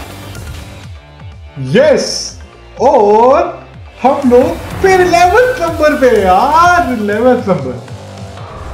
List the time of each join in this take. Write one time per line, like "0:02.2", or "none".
none